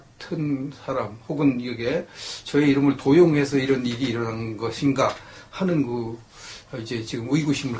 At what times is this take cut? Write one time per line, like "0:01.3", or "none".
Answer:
0:01.2